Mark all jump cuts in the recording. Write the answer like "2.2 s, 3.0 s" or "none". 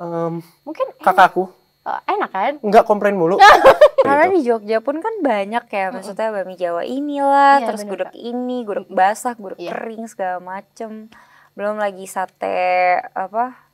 4.1 s